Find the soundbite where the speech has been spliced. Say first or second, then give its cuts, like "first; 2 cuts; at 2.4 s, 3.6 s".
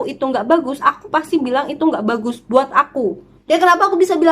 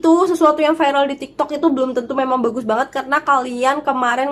first; 1 cut; at 3.3 s